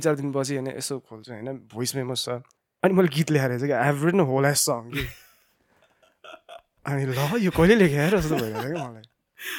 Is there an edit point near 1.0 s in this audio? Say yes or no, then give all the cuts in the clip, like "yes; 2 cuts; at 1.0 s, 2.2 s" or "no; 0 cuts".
no; 1 cut; at 2.6 s